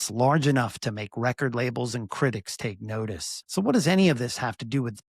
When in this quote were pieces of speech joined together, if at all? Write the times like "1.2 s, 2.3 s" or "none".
3.3 s